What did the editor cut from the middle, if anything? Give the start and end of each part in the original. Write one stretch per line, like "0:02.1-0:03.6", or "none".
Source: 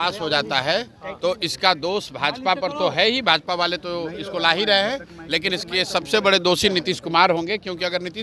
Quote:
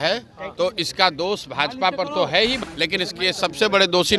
0:03.2-0:05.1